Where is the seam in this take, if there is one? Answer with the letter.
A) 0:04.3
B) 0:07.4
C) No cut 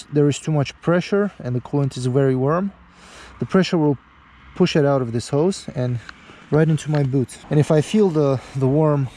B